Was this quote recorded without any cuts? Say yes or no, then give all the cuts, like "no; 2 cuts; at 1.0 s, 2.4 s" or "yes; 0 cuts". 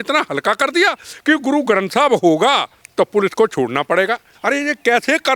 no; 2 cuts; at 2.8 s, 4.3 s